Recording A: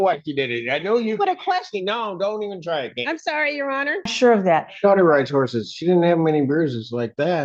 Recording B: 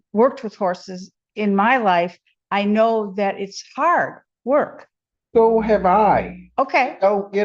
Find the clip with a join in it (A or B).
A